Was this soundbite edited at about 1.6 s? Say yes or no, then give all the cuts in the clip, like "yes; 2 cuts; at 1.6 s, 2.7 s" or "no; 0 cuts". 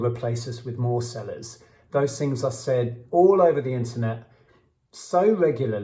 no; 0 cuts